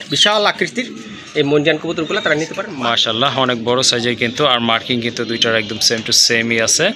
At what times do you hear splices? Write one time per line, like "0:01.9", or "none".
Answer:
0:02.7